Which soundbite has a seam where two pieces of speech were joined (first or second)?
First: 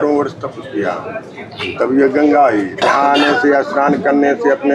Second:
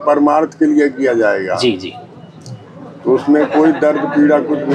first